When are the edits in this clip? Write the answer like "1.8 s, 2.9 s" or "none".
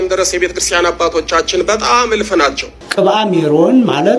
2.7 s